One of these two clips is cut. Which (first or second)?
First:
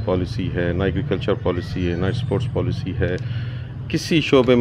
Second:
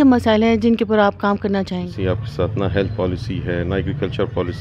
second